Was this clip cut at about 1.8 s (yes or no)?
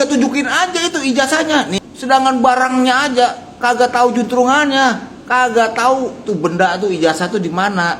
yes